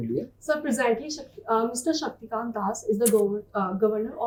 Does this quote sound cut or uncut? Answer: uncut